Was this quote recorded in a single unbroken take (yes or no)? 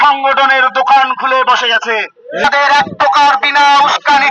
no